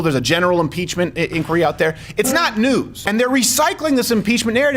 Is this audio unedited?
no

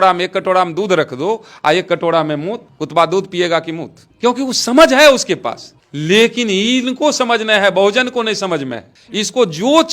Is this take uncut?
yes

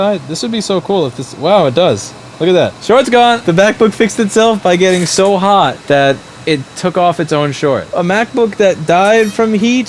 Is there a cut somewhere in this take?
yes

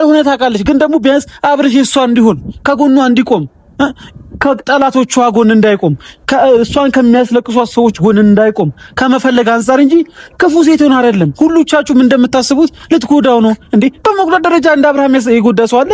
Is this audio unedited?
yes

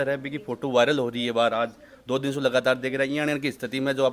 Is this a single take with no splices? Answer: yes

